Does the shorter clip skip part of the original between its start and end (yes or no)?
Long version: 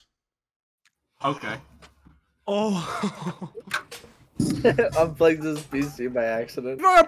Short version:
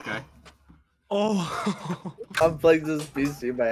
yes